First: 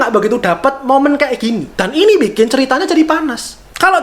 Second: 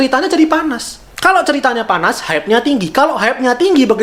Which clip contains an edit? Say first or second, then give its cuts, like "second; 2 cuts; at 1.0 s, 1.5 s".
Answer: first; 1 cut; at 1.7 s